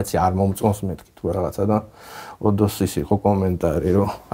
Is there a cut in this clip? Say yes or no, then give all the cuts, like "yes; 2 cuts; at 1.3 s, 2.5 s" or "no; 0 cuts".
no; 0 cuts